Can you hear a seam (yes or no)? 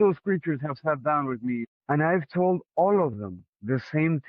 yes